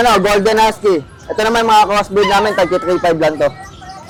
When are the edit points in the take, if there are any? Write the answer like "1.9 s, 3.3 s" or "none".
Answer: none